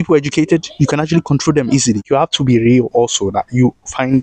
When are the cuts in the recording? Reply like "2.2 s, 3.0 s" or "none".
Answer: 2.0 s